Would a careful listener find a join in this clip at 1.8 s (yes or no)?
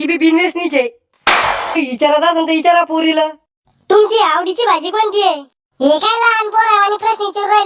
yes